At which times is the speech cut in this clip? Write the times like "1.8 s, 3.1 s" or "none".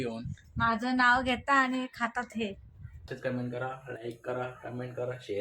3.0 s